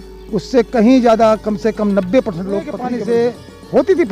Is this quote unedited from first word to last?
no; 1 cut; at 2.9 s

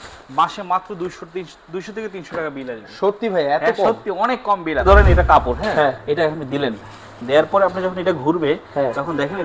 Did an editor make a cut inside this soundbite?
yes; 1 cut; at 4.8 s

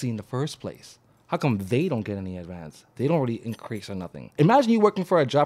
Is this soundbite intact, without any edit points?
no; 1 cut; at 4.3 s

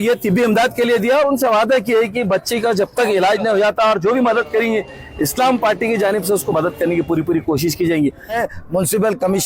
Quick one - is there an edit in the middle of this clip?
yes; 1 cut; at 8.4 s

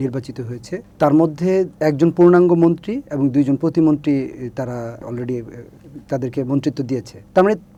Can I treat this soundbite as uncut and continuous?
yes; 0 cuts

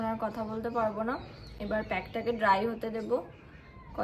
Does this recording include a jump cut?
no; 0 cuts

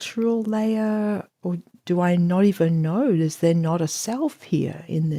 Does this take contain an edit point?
no; 0 cuts

